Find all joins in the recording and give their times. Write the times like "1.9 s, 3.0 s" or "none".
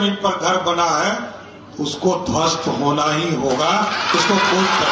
none